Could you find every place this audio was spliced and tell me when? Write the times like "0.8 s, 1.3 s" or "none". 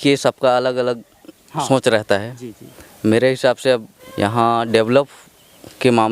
4.0 s

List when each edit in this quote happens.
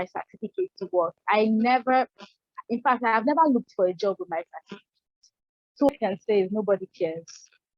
5.9 s

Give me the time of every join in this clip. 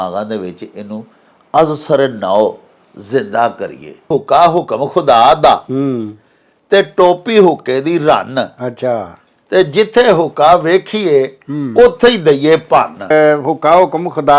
4.1 s, 13.1 s

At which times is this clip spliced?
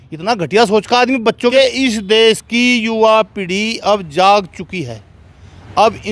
1.5 s

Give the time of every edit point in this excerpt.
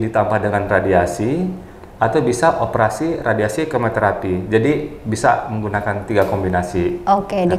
none

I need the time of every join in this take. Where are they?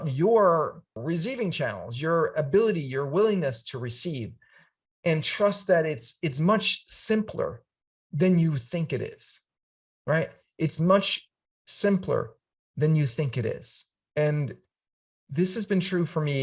1.0 s

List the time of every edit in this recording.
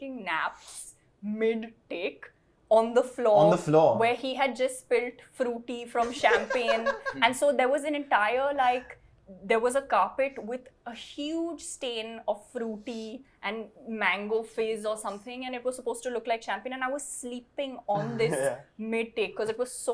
none

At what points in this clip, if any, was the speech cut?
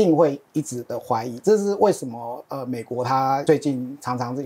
3.4 s

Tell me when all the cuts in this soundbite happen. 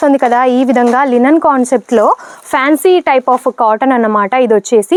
none

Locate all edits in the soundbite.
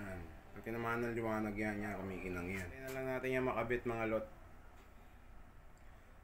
2.9 s

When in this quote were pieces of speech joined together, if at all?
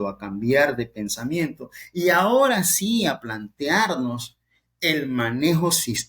none

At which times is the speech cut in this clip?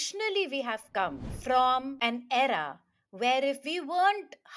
1.3 s, 1.9 s

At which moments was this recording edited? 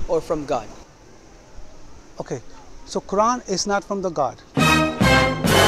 4.4 s

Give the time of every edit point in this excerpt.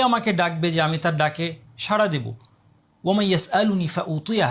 none

